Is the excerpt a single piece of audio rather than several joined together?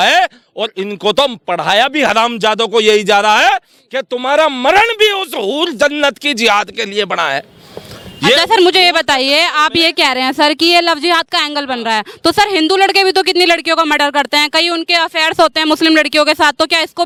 yes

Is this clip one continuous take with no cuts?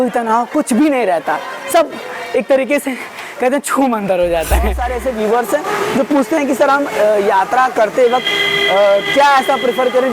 no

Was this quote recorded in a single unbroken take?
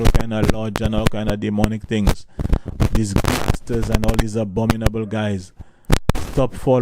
no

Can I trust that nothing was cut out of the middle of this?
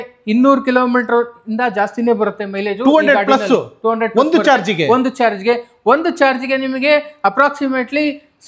yes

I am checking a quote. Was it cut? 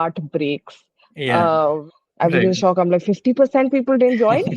yes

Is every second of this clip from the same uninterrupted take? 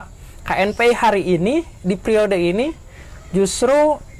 yes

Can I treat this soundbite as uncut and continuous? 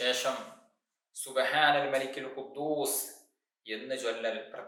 yes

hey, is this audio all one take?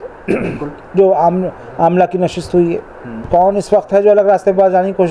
no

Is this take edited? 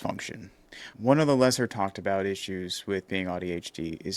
no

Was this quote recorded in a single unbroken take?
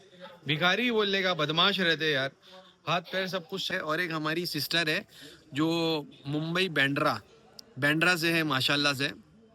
no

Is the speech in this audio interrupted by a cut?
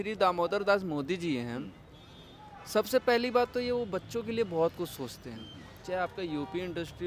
no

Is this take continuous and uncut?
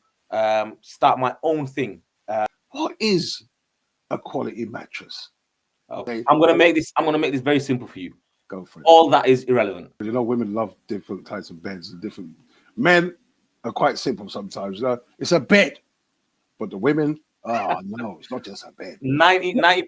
no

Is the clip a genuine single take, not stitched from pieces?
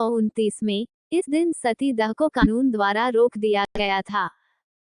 no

